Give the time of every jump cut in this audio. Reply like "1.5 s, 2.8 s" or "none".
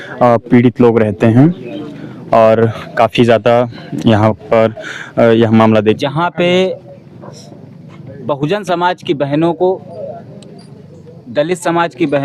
5.8 s